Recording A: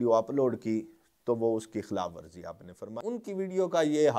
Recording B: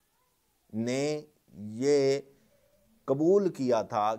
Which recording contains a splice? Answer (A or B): A